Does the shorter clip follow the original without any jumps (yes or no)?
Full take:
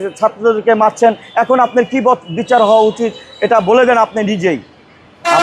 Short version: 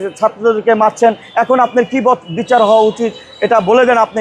yes